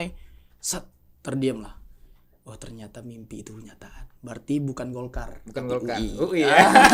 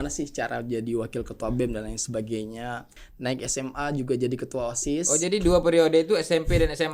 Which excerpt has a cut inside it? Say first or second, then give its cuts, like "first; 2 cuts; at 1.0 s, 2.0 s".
second; 1 cut; at 2.9 s